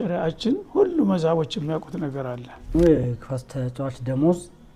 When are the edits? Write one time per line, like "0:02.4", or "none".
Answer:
0:02.7